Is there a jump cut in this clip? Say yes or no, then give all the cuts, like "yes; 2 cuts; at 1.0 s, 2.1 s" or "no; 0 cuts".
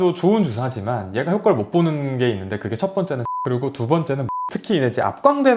yes; 2 cuts; at 3.3 s, 4.3 s